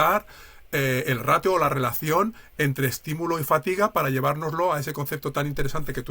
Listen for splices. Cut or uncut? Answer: uncut